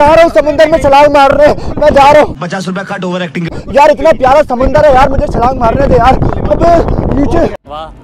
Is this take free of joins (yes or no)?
yes